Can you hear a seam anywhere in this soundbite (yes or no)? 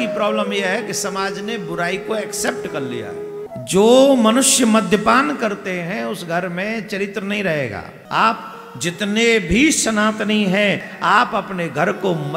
yes